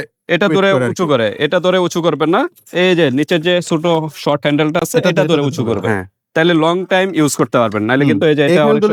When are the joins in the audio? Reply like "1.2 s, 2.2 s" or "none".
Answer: none